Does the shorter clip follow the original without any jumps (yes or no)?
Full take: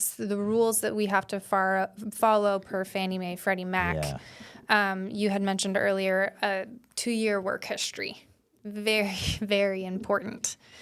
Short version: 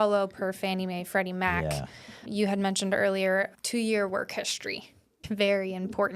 no